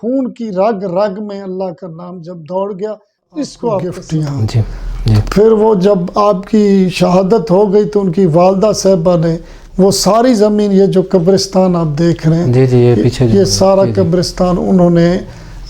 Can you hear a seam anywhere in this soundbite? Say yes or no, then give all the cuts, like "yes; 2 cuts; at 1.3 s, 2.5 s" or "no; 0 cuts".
yes; 1 cut; at 4.0 s